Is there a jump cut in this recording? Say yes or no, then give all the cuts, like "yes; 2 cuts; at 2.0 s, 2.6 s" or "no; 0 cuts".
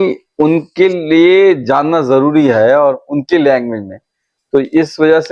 no; 0 cuts